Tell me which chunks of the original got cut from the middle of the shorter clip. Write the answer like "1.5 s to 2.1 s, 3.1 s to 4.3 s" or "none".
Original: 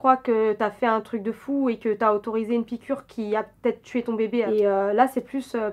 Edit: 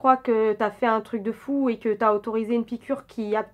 none